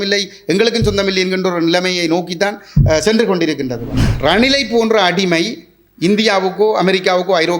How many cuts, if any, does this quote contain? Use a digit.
1